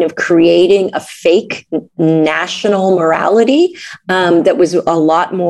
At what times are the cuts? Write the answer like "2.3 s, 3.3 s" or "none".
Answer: none